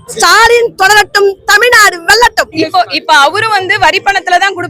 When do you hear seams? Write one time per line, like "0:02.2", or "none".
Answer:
0:02.5